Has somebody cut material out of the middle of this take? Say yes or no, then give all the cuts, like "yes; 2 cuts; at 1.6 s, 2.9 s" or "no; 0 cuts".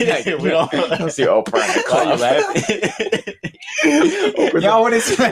no; 0 cuts